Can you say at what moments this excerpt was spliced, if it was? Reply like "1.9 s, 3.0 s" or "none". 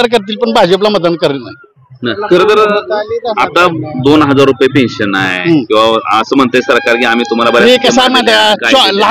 none